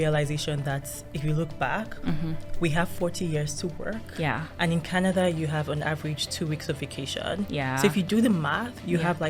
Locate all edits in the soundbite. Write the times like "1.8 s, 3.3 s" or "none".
none

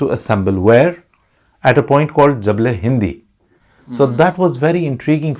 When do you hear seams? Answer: none

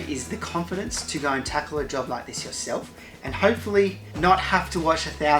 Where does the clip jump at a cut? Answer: none

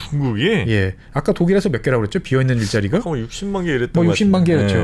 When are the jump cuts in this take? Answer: none

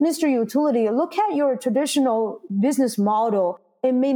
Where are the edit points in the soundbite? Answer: none

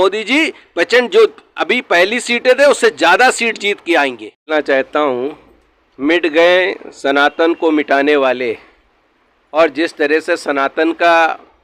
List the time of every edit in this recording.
4.5 s

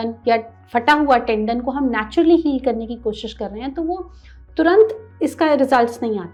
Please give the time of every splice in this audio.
none

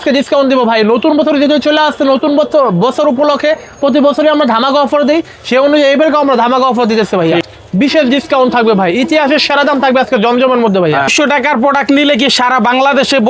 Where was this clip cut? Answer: 7.4 s, 11.1 s

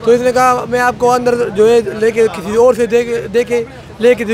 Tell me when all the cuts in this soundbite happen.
none

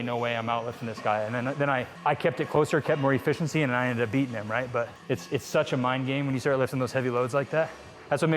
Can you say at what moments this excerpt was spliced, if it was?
1.9 s, 5.0 s

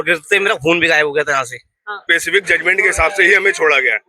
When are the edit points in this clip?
2.0 s

